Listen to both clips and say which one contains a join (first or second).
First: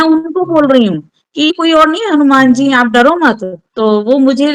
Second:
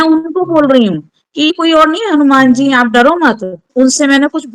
second